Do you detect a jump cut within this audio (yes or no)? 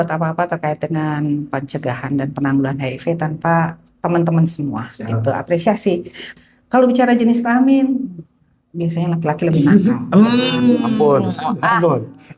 yes